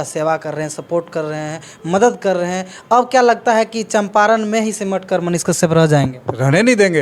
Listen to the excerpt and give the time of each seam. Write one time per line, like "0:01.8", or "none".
none